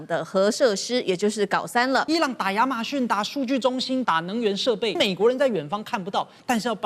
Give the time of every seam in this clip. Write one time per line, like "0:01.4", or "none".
0:02.1
0:04.0
0:05.0